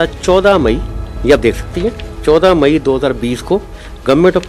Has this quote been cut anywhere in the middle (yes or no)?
no